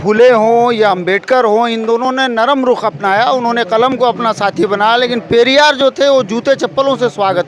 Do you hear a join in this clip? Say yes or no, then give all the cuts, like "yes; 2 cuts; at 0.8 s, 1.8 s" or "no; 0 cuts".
no; 0 cuts